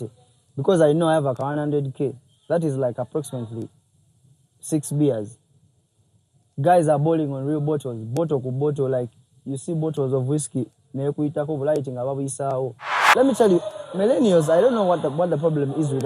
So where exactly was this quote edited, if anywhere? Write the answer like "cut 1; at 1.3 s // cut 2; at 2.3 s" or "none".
cut 1; at 13.0 s